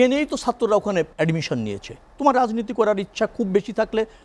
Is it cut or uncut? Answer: cut